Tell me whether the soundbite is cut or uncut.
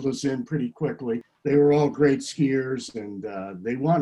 cut